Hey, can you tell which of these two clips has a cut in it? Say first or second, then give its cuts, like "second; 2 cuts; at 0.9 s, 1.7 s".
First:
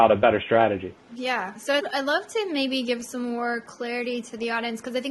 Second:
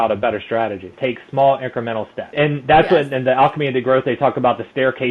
second; 2 cuts; at 0.9 s, 2.3 s